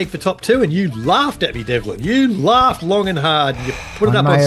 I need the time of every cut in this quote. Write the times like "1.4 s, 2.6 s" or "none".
none